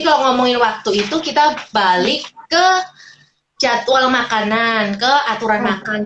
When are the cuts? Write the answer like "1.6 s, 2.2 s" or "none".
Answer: none